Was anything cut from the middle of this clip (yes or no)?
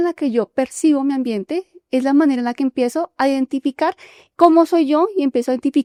no